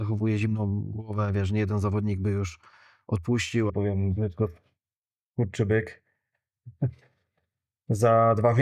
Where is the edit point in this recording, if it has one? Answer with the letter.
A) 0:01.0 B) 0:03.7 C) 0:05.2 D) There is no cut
B